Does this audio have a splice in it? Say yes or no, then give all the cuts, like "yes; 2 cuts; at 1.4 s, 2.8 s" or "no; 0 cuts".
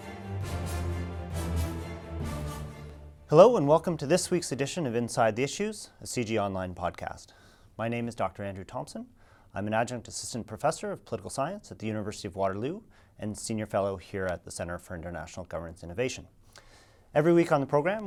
no; 0 cuts